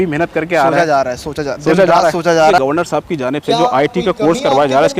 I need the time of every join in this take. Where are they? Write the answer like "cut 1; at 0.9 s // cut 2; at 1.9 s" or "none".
cut 1; at 2.6 s